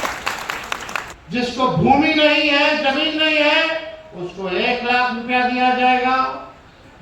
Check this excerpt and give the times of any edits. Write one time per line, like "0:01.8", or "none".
0:01.0